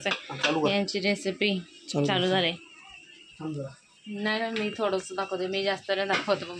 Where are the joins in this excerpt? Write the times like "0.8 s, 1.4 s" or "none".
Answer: none